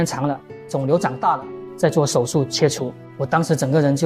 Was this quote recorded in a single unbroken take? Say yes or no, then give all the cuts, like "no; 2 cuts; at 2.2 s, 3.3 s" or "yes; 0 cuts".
yes; 0 cuts